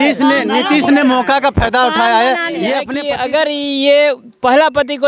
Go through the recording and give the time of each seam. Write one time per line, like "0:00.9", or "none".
0:02.9

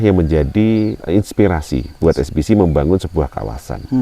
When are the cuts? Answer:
0:01.0

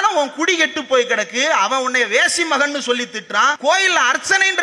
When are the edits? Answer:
0:03.6

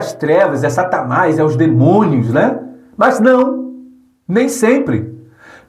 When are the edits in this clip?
none

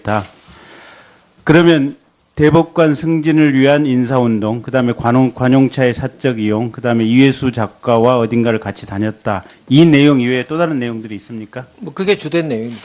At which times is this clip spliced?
0:06.1

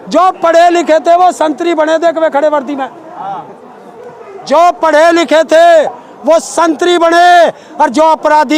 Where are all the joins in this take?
none

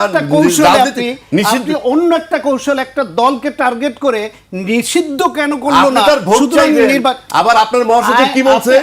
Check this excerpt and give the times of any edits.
none

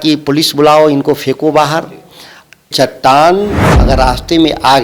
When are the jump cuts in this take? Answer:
0:02.7

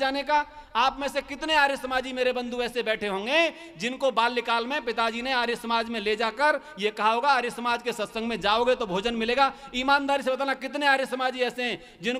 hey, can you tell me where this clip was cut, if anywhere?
none

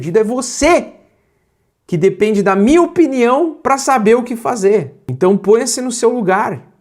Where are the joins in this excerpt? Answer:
0:05.0

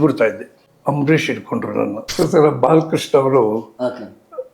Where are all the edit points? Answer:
0:02.0

